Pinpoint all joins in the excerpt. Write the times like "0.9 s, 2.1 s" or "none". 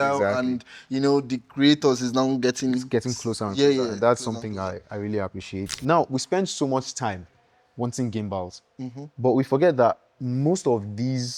5.8 s

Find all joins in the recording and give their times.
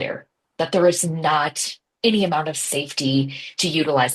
none

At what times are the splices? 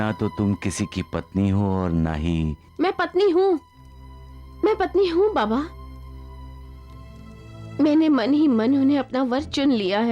none

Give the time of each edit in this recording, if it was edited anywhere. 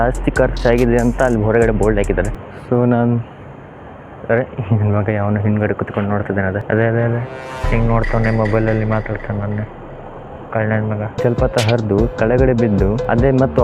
2.3 s, 6.6 s, 11.2 s

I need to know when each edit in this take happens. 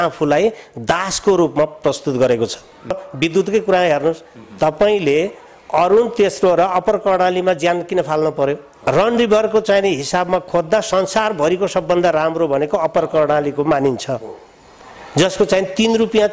3.1 s, 8.7 s

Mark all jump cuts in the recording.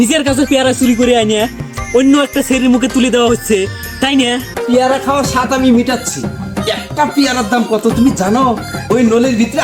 4.5 s

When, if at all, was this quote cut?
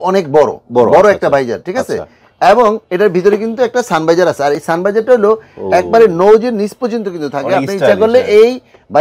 none

